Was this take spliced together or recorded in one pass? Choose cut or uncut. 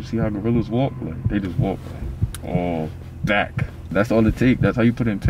cut